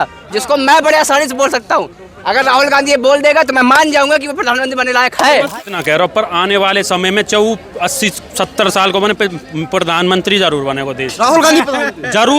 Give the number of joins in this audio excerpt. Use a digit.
1